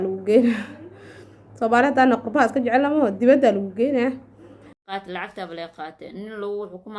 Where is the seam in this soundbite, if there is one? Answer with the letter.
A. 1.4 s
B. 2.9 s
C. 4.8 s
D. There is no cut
C